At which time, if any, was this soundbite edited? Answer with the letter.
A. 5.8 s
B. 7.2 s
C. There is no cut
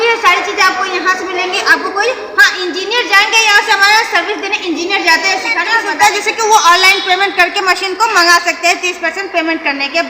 A